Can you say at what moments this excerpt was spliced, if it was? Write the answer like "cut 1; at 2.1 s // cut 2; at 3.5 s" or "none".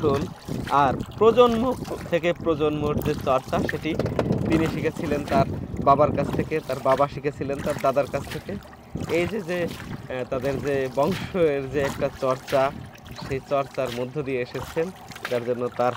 none